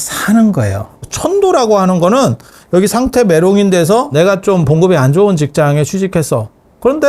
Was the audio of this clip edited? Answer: yes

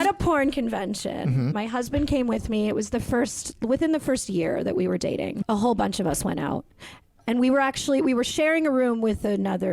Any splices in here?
yes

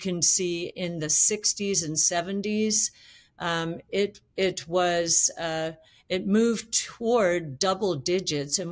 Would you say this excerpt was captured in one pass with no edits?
yes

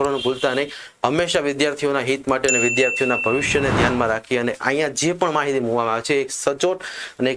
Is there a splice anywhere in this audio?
no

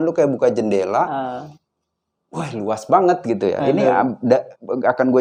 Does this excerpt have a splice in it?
no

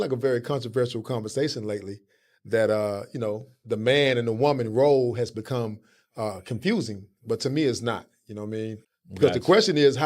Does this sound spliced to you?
yes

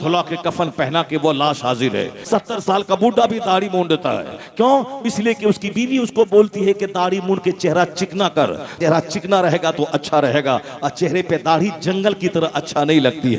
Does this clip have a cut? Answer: yes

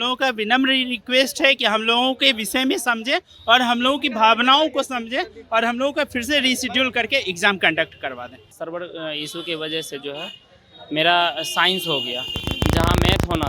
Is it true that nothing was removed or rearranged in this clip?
no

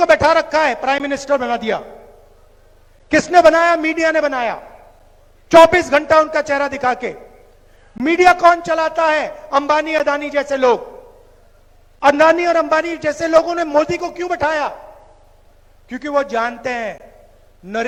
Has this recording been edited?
no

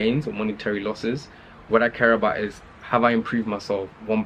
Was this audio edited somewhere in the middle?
no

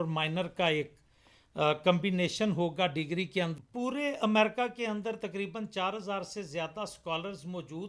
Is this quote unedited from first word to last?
no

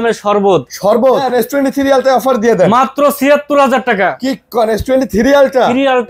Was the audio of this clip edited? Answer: yes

